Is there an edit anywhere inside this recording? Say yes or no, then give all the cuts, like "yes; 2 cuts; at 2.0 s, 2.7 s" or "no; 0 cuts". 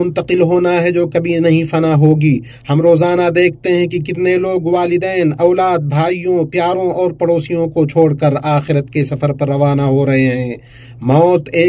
no; 0 cuts